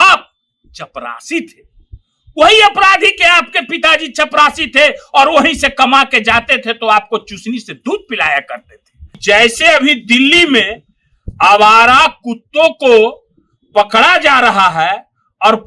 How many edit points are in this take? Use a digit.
1